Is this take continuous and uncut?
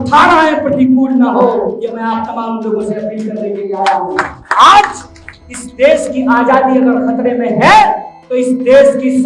yes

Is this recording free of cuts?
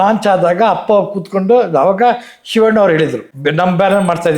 no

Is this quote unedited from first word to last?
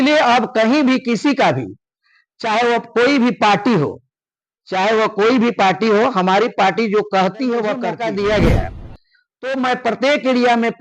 no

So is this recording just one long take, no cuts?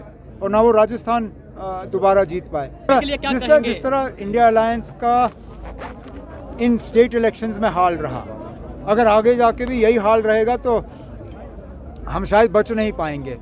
no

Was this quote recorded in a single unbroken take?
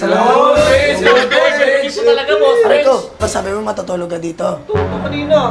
no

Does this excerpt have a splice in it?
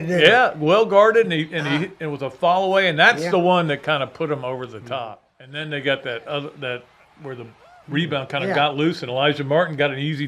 yes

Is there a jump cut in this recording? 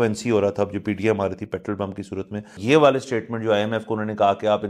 yes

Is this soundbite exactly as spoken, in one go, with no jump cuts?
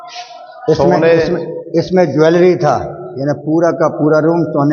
yes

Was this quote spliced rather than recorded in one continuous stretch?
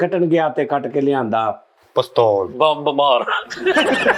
no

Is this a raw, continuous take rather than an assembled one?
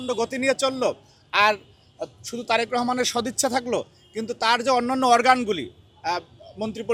yes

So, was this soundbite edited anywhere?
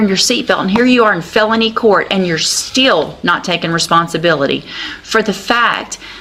no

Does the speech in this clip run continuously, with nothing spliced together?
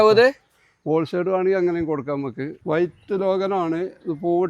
no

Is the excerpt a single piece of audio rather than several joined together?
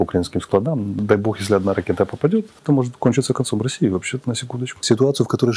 no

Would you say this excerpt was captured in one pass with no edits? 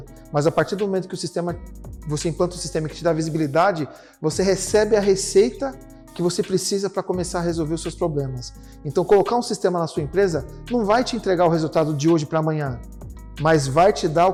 yes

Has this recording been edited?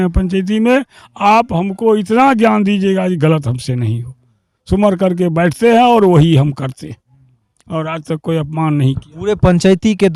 no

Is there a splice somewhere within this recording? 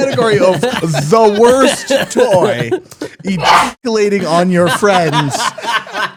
no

